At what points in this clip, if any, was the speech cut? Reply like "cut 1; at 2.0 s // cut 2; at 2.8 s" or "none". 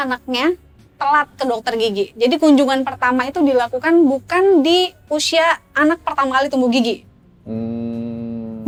none